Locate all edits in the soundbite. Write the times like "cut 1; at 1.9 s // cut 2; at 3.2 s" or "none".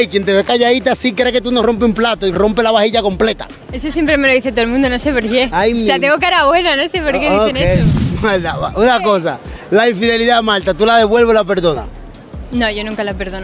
cut 1; at 8.0 s